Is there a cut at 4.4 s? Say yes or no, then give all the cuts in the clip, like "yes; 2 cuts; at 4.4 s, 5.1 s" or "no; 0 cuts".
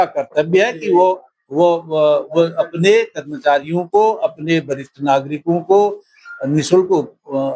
no; 0 cuts